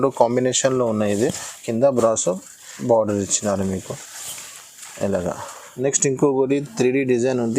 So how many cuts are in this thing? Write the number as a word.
one